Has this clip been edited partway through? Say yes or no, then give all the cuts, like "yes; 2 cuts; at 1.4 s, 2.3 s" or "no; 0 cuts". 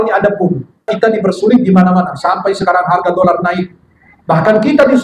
yes; 1 cut; at 0.9 s